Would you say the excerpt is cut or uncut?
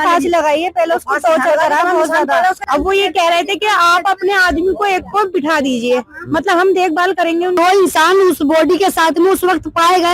cut